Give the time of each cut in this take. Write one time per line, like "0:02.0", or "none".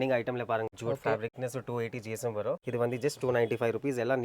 0:01.2
0:02.6